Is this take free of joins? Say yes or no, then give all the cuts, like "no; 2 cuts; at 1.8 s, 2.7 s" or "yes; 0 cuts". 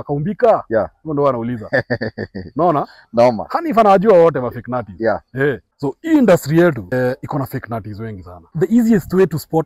no; 3 cuts; at 5.7 s, 6.9 s, 8.4 s